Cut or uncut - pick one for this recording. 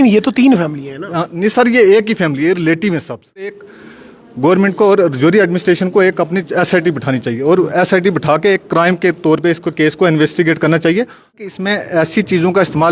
cut